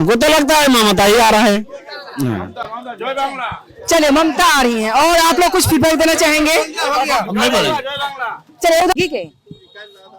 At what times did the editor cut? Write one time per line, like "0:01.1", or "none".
none